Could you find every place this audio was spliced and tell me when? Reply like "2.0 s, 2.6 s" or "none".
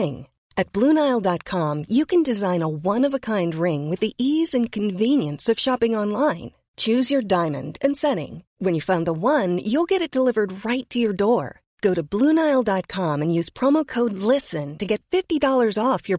none